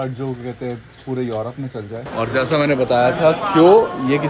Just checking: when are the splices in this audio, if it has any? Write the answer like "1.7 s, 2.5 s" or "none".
2.0 s